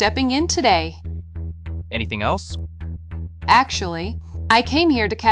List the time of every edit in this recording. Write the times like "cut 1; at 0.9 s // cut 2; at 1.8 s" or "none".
none

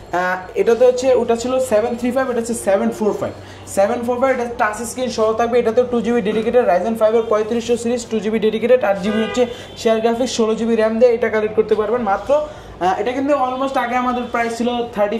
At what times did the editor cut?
none

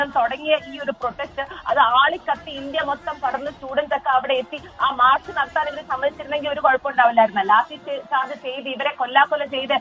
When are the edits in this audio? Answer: none

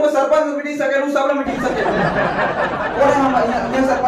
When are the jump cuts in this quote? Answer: none

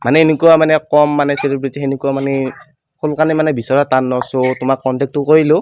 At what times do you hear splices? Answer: none

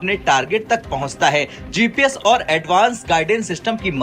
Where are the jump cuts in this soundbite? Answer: none

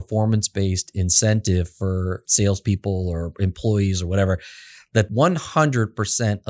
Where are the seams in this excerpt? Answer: cut 1; at 2.2 s // cut 2; at 5.1 s

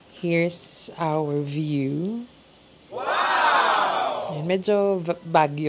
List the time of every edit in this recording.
cut 1; at 2.9 s // cut 2; at 4.3 s

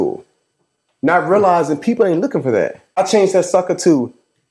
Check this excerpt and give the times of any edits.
cut 1; at 2.8 s

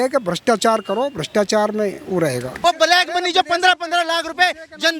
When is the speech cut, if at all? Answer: cut 1; at 2.5 s

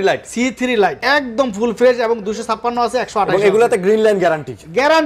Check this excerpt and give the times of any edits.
cut 1; at 1.0 s

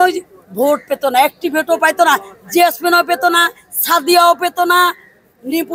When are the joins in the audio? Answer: none

